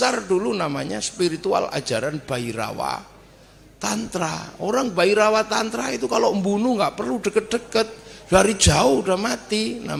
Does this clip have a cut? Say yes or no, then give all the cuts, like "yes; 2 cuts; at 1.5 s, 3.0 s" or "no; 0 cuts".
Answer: no; 0 cuts